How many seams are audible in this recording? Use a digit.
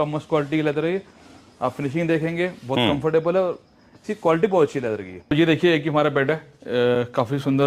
1